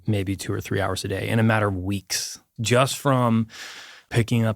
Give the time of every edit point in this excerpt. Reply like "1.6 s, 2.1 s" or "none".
2.5 s